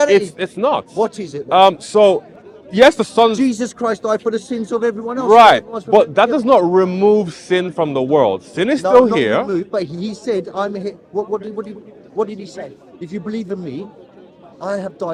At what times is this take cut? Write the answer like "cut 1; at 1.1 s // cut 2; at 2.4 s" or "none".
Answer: none